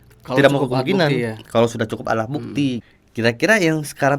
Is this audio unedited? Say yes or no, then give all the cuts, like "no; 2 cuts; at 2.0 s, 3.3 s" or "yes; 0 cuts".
no; 1 cut; at 2.9 s